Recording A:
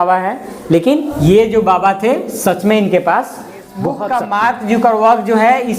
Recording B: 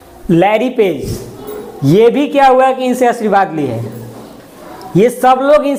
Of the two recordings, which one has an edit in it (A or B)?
A